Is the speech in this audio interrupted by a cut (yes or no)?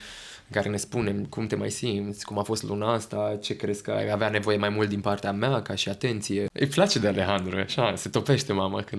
yes